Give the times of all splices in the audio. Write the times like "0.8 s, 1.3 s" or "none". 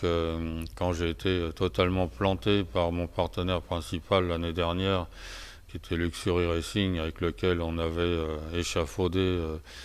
1.5 s